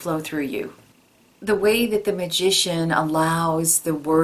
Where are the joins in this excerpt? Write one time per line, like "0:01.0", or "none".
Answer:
0:00.9